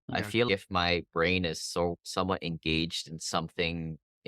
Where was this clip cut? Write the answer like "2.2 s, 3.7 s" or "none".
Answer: none